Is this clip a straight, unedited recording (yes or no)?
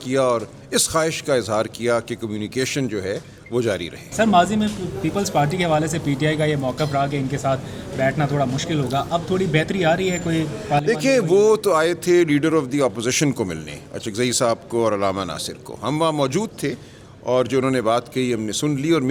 yes